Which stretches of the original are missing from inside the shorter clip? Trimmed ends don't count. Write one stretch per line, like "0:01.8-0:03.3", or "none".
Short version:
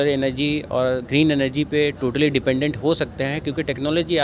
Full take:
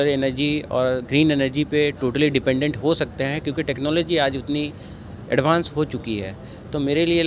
none